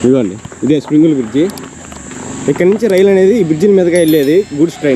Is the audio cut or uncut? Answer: uncut